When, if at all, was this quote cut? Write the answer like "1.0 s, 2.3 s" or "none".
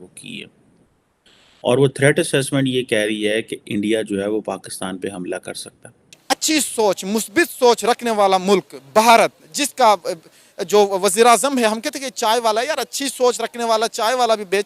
6.2 s

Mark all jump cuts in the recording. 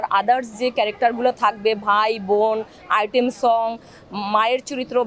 none

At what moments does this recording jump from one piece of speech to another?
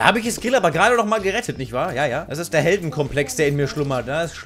2.3 s

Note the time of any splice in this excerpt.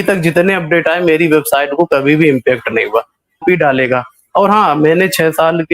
3.4 s

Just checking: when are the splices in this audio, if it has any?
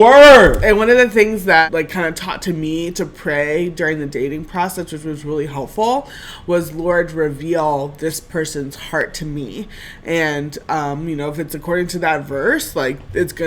1.7 s

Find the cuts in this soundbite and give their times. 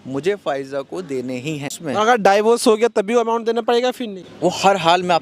1.7 s, 4.2 s

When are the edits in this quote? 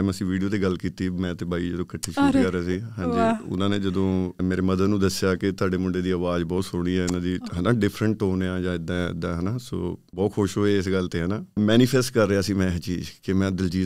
4.4 s, 10.0 s, 11.6 s

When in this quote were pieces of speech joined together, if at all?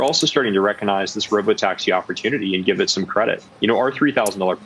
3.5 s

